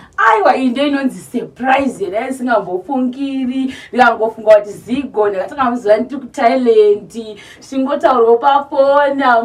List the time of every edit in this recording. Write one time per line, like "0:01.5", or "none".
none